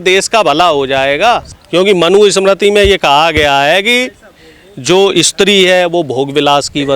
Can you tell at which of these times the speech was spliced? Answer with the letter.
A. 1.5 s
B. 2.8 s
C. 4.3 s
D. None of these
A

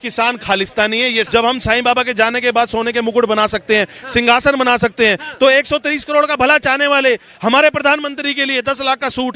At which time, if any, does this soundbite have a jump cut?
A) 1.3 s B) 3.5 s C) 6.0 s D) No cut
A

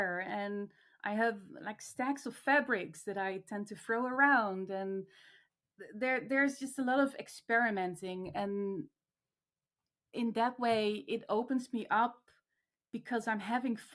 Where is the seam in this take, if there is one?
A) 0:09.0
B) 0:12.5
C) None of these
C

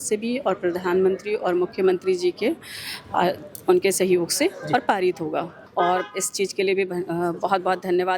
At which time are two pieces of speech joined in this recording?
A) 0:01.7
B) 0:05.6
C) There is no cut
B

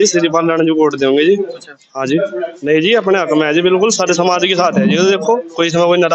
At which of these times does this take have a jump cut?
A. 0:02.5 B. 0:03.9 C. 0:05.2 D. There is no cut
A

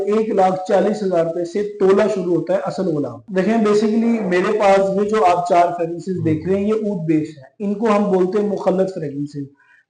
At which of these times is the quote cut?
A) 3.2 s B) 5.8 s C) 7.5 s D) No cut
A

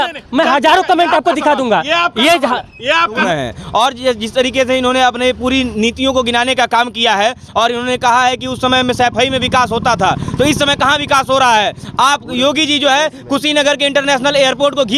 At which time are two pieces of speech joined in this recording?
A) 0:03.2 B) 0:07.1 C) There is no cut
A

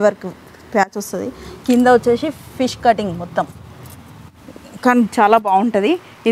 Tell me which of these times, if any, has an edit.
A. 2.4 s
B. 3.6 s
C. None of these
C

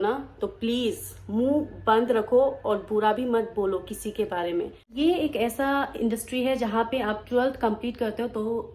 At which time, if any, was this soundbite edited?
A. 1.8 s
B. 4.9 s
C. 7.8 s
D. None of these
B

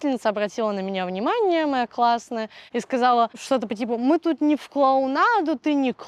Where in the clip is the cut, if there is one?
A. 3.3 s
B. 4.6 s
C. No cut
C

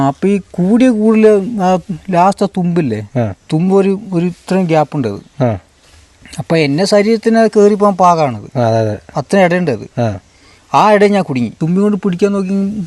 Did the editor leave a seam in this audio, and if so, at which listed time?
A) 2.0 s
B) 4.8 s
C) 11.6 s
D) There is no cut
C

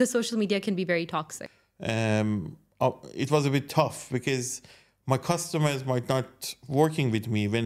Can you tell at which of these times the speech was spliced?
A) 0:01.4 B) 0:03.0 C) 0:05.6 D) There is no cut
A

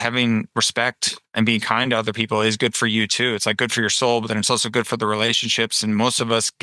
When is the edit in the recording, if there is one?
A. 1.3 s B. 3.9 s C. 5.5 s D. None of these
A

